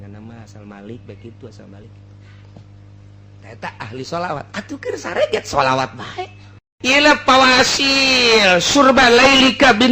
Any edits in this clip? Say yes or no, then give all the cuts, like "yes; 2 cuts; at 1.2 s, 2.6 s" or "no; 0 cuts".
yes; 1 cut; at 6.7 s